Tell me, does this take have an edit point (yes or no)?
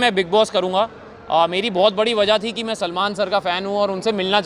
no